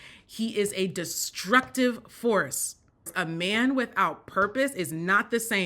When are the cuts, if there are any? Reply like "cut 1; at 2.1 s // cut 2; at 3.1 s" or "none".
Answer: cut 1; at 3.1 s